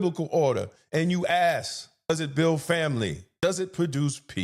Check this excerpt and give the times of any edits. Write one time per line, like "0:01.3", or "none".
0:02.1
0:03.3